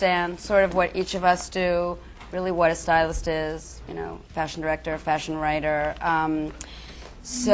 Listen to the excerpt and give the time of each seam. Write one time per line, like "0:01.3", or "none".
0:01.3